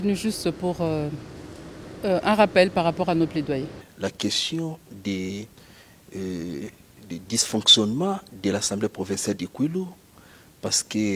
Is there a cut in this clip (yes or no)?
yes